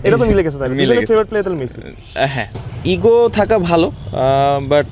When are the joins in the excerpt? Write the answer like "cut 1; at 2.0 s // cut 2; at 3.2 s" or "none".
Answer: cut 1; at 2.5 s